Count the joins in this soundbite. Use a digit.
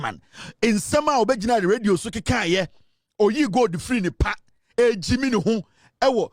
0